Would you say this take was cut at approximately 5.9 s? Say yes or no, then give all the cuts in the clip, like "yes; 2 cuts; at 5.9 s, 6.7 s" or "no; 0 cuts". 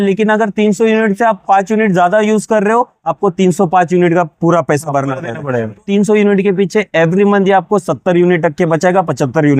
yes; 1 cut; at 5.9 s